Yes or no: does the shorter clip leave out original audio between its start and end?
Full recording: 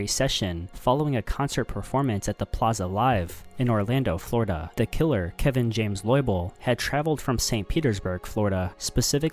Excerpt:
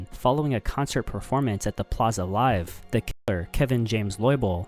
yes